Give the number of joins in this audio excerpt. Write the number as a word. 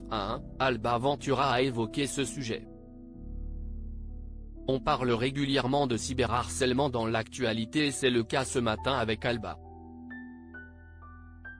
zero